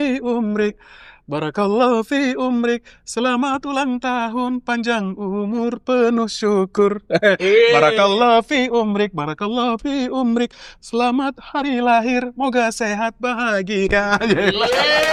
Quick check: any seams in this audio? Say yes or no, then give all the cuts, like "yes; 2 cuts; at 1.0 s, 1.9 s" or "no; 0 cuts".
no; 0 cuts